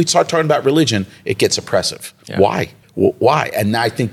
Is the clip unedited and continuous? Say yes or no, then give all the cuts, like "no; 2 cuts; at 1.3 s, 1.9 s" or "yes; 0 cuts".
no; 1 cut; at 2.8 s